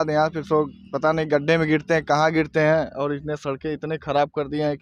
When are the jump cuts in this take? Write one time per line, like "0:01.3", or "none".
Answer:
none